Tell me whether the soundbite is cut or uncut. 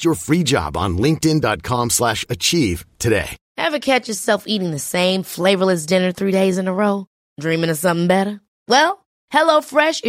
cut